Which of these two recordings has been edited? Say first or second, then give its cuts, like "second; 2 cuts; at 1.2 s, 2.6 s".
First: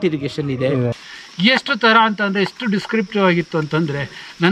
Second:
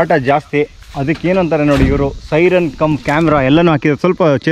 first; 1 cut; at 1.0 s